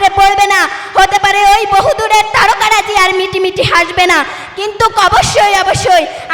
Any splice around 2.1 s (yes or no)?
no